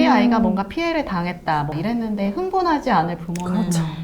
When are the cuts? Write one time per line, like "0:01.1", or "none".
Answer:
0:01.8